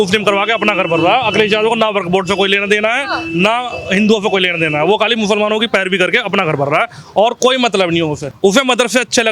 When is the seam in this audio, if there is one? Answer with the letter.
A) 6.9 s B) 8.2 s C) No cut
B